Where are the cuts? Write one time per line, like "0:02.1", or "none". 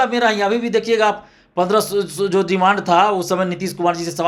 none